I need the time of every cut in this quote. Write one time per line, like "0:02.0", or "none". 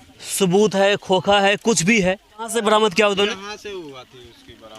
0:02.5